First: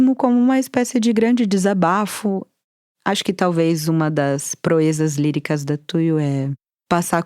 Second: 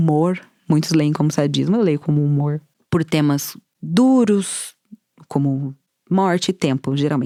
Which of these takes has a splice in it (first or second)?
first